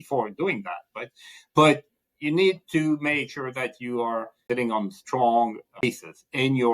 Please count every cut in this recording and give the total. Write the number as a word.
two